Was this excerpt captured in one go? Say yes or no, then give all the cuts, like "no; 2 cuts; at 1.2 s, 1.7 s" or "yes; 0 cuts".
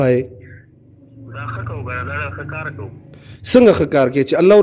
yes; 0 cuts